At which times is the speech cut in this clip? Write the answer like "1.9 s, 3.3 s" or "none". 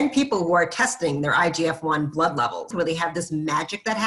2.7 s